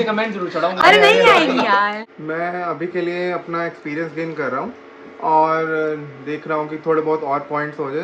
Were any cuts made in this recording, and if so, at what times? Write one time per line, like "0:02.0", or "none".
none